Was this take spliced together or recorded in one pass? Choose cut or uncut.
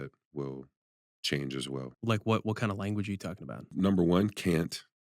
cut